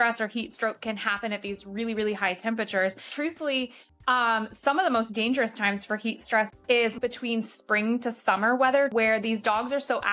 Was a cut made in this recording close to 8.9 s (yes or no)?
yes